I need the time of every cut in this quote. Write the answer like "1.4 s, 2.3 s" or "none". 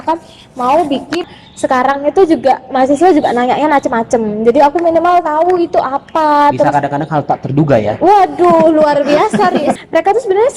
1.4 s, 9.7 s

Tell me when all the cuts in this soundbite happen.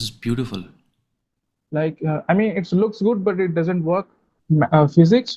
4.3 s

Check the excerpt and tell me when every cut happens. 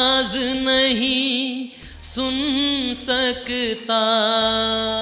none

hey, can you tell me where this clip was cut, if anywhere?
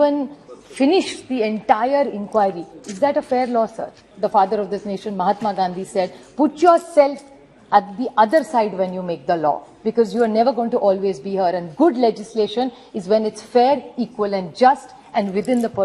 4.1 s

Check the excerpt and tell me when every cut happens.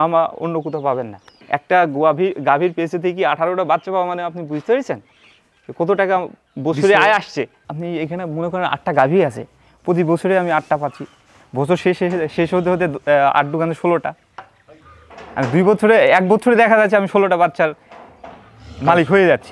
1.3 s, 7.6 s

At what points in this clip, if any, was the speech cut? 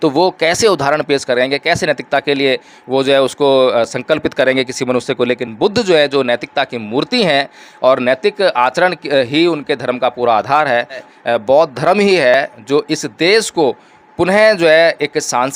11.0 s

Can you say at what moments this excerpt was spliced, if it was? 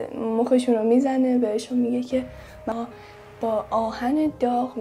1.2 s, 2.7 s

